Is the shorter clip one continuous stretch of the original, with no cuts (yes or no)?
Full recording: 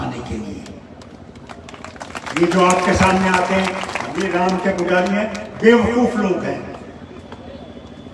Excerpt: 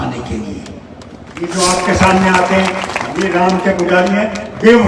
no